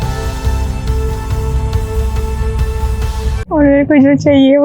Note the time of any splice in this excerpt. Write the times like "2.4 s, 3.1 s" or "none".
3.4 s